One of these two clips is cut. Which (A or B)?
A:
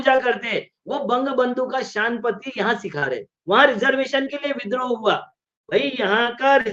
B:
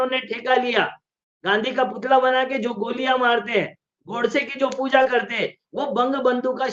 A